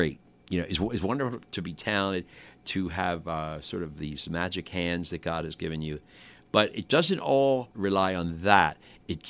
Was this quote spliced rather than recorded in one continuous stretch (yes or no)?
yes